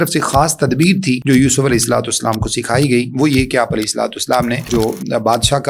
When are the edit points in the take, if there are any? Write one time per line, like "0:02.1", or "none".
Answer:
0:01.2
0:04.7